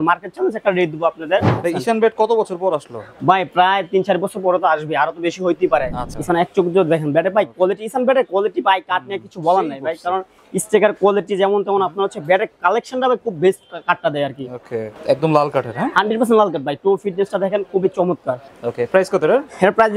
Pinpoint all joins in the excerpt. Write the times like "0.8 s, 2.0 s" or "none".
1.5 s, 6.0 s, 14.9 s, 18.5 s